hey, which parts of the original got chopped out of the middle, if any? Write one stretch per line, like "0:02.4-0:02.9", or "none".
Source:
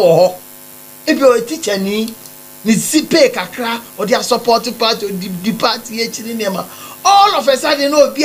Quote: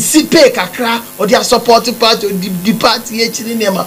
none